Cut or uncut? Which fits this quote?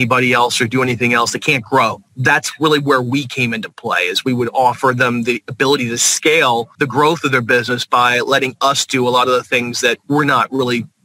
cut